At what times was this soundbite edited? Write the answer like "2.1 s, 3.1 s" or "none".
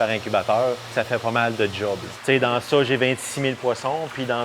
0.9 s, 2.1 s